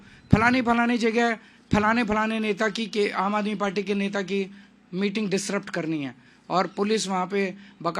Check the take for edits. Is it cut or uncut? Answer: uncut